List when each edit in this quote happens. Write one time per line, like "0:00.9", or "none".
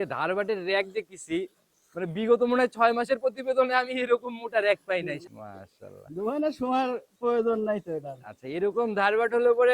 0:05.2